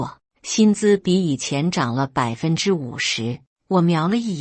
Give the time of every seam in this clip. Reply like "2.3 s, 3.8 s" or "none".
3.5 s